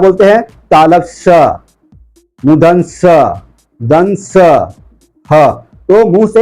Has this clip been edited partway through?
no; 0 cuts

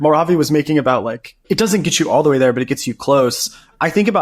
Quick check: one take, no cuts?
no; 1 cut; at 1.4 s

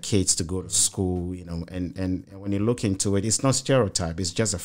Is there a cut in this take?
no; 0 cuts

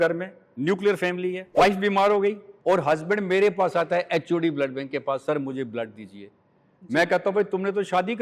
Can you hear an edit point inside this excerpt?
yes; 2 cuts; at 1.4 s, 2.5 s

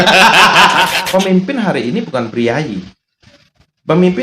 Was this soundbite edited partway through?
yes; 1 cut; at 0.9 s

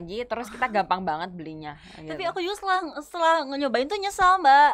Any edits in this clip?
no; 0 cuts

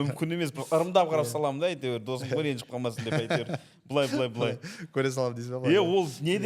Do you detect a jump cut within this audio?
no; 0 cuts

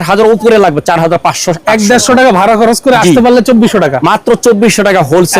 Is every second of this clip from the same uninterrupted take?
yes; 0 cuts

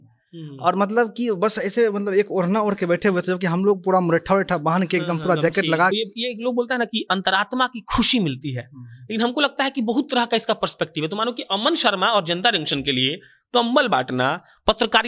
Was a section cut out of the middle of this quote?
yes; 1 cut; at 5.9 s

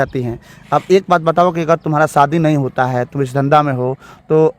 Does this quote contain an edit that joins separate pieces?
no; 0 cuts

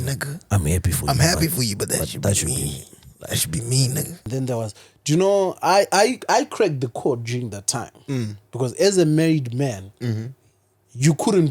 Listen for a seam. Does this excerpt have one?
yes; 1 cut; at 4.3 s

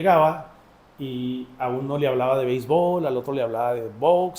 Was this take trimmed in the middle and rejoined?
no; 0 cuts

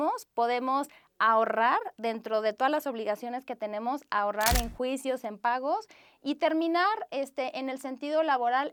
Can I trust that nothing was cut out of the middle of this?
yes; 0 cuts

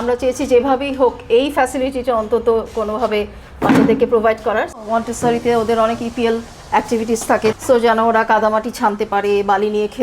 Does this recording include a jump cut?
yes; 2 cuts; at 4.8 s, 7.5 s

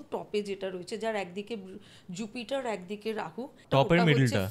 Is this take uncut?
no; 1 cut; at 3.6 s

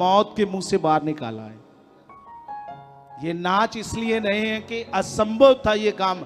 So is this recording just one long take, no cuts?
yes; 0 cuts

